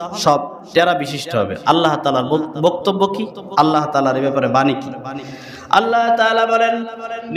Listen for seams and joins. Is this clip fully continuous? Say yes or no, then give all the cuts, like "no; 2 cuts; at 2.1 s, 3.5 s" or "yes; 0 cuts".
yes; 0 cuts